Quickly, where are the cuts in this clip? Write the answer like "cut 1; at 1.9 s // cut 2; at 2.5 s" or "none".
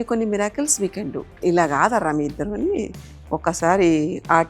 cut 1; at 1.4 s